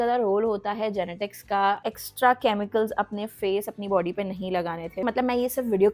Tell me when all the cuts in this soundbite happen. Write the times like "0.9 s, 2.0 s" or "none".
1.8 s, 5.0 s